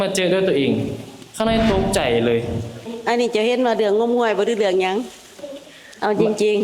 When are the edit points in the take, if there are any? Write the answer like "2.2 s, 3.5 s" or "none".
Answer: 2.9 s